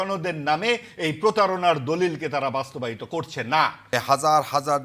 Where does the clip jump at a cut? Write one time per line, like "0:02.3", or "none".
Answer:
0:03.9